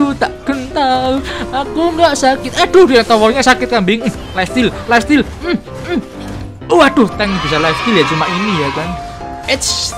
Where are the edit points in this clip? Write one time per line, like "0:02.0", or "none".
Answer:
0:08.9